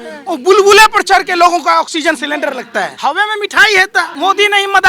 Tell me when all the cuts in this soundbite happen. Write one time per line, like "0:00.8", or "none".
0:02.9
0:04.1